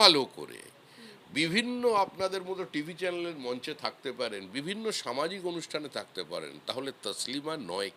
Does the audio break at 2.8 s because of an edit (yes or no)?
no